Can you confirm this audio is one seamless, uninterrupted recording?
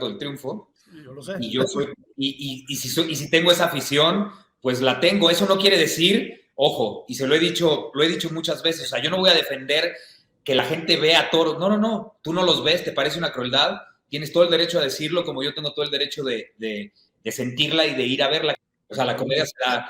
no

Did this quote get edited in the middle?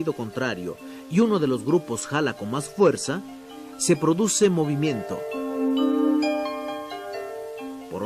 yes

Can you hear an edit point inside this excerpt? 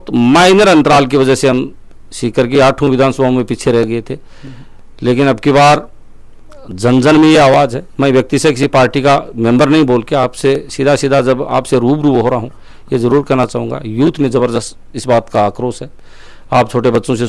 no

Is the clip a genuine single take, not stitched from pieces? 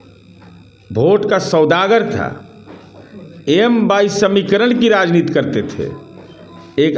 yes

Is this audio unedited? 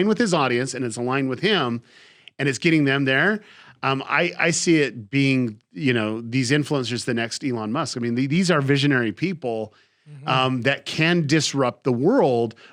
yes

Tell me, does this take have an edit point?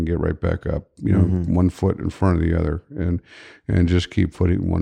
no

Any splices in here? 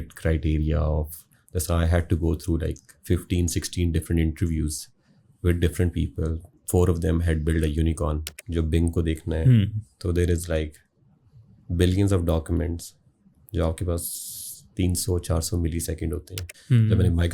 yes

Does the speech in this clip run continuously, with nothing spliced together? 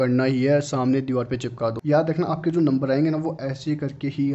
no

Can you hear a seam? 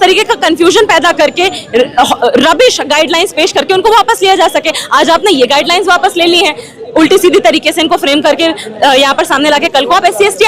no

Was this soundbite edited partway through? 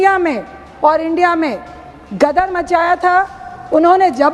no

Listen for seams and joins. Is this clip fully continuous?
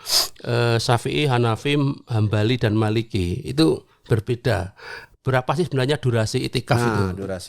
yes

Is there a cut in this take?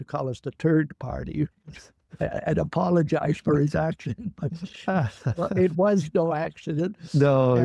no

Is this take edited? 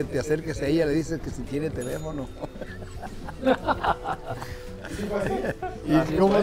no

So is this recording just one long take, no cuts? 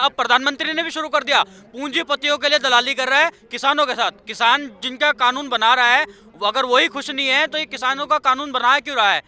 yes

